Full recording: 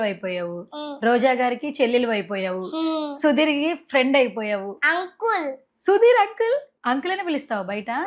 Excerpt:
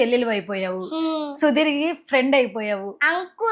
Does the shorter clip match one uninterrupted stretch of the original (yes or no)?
yes